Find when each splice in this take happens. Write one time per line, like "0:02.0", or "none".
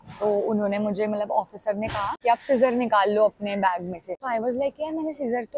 0:02.1
0:04.1